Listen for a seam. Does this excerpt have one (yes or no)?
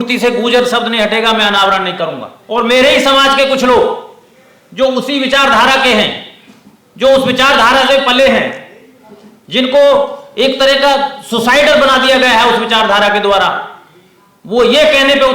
yes